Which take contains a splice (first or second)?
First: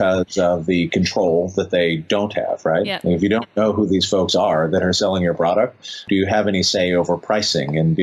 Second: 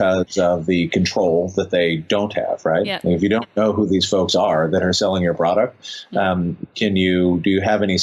first